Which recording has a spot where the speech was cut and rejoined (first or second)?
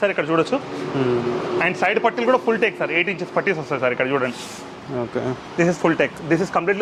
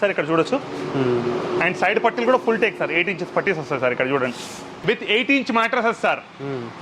second